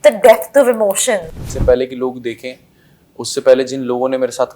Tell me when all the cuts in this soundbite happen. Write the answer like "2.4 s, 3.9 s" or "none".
1.3 s